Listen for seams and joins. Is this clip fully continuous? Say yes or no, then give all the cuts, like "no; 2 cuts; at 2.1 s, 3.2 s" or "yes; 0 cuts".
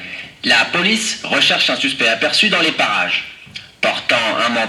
yes; 0 cuts